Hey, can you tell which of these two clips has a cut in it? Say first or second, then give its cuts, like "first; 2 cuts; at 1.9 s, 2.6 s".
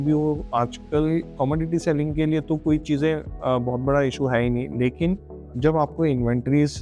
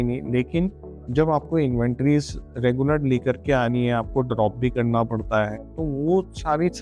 first; 2 cuts; at 1.3 s, 3.3 s